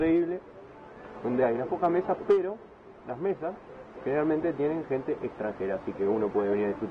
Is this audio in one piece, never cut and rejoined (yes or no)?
yes